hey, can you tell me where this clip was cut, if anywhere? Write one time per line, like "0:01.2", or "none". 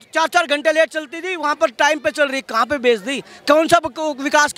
none